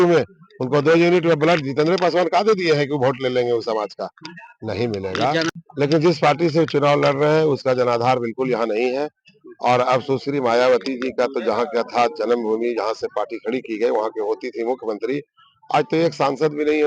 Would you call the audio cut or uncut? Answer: cut